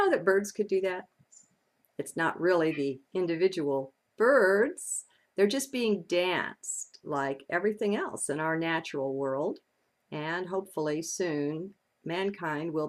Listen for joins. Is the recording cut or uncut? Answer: uncut